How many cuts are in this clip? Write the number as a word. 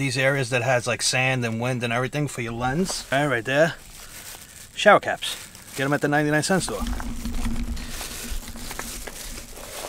one